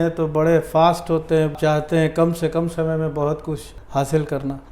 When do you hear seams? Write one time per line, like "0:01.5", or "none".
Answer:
0:01.5